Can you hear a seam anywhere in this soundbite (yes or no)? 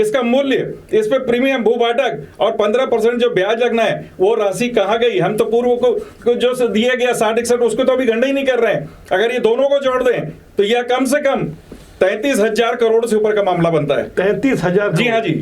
no